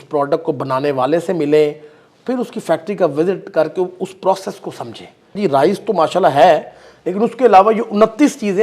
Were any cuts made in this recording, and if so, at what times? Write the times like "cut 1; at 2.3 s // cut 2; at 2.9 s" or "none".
cut 1; at 5.3 s